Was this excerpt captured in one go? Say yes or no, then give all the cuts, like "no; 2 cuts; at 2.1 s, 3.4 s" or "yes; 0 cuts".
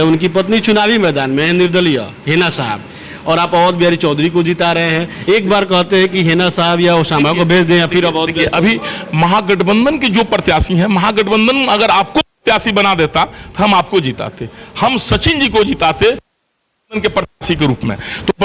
yes; 0 cuts